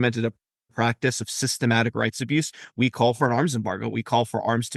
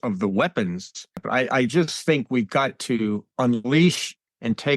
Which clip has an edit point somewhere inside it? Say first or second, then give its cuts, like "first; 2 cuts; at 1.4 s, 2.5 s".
second; 1 cut; at 1.2 s